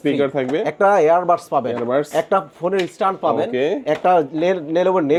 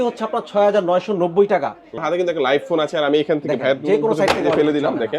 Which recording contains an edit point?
second; 1 cut; at 2.0 s

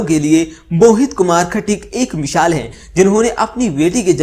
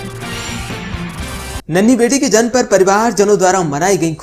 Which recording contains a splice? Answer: second; 1 cut; at 1.6 s

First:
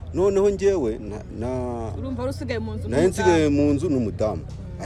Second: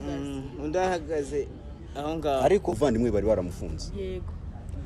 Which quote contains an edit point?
second; 1 cut; at 2.7 s

